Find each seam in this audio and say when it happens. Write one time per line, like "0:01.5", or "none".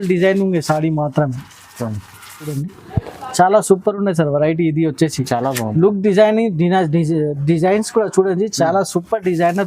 0:02.6